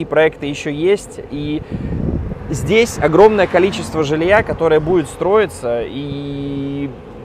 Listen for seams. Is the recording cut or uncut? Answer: uncut